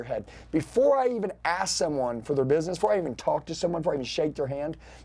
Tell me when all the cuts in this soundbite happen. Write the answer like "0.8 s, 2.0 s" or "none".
none